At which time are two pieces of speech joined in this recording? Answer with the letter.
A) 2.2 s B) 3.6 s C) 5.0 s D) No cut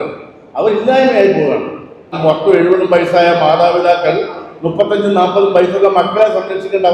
A